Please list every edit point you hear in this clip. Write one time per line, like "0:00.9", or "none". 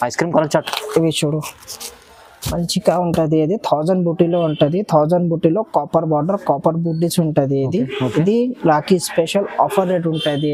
none